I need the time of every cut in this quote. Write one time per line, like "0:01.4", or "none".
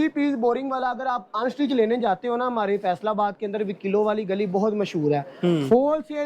none